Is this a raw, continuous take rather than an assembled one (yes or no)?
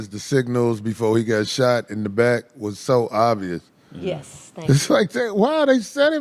yes